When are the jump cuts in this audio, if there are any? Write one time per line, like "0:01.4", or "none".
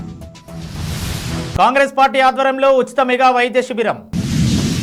none